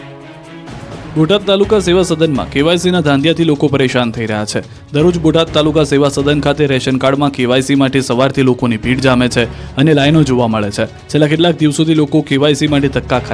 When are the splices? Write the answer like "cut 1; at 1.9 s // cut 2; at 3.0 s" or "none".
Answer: cut 1; at 1.1 s